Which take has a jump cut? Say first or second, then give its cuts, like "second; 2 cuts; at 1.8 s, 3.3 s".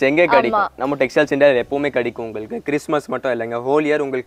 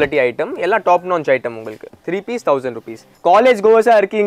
second; 1 cut; at 3.1 s